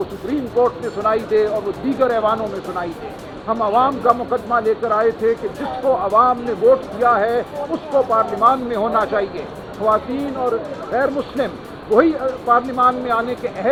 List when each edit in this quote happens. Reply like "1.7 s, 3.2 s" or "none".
none